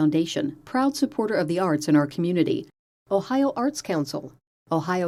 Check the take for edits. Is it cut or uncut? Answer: uncut